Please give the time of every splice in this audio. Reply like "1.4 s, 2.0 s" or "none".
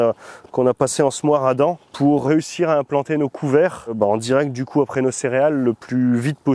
2.2 s, 3.9 s